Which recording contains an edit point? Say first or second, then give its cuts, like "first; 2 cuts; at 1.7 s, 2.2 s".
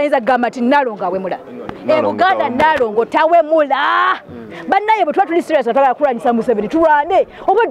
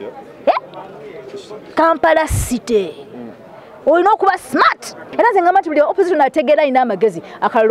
second; 1 cut; at 5.0 s